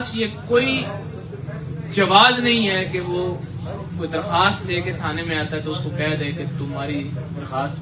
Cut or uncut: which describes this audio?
uncut